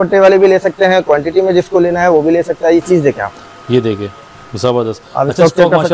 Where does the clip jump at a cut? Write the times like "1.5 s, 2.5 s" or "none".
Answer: none